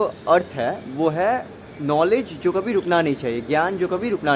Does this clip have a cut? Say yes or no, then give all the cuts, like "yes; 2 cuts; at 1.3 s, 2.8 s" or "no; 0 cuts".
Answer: no; 0 cuts